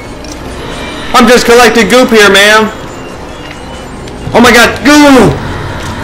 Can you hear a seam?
no; 0 cuts

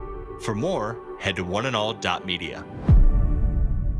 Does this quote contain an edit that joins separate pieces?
no; 0 cuts

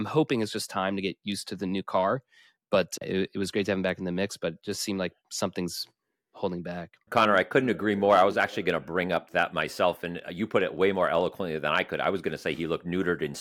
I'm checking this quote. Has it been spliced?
no; 0 cuts

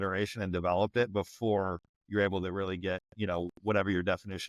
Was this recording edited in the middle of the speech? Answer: no; 0 cuts

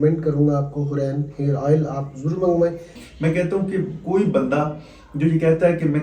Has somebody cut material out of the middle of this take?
yes; 1 cut; at 3.0 s

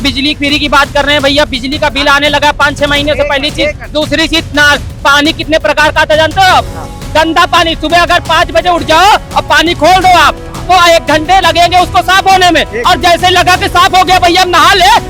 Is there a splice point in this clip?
no; 0 cuts

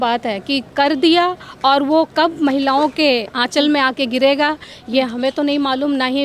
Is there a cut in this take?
no; 0 cuts

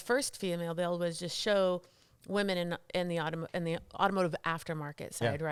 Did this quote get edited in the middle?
no; 0 cuts

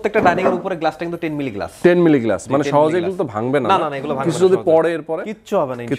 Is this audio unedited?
yes; 0 cuts

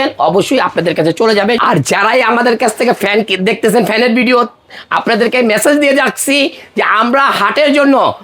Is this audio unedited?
no; 1 cut; at 1.6 s

